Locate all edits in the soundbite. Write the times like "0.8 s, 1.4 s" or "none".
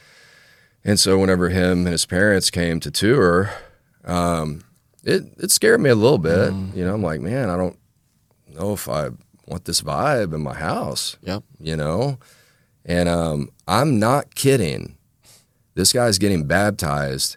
none